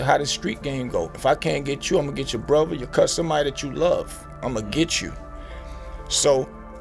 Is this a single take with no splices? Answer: yes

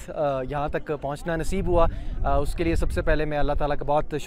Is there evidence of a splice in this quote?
no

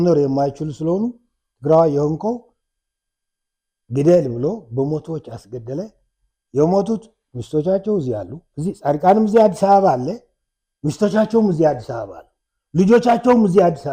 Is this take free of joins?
yes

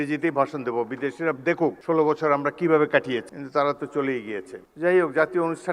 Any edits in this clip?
yes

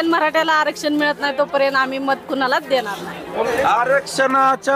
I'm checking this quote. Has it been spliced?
yes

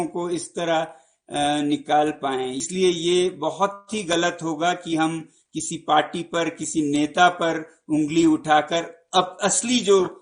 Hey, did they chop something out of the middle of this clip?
yes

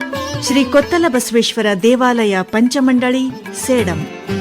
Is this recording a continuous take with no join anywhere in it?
yes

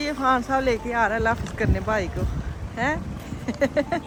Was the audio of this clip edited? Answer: no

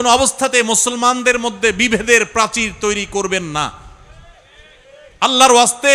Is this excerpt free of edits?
yes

